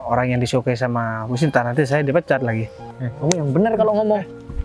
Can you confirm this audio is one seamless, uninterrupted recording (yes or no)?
no